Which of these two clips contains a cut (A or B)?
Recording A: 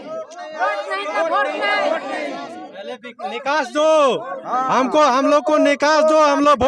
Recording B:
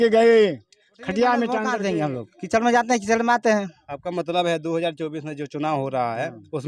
B